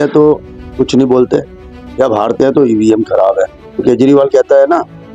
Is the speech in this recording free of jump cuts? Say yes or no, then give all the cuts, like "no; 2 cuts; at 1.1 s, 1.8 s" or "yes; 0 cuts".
no; 1 cut; at 3.8 s